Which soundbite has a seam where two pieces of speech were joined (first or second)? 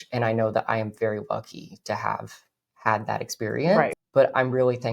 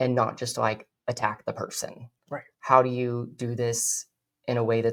first